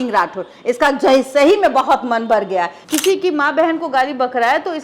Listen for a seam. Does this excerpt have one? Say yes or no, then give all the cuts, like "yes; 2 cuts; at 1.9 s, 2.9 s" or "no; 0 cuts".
yes; 1 cut; at 2.8 s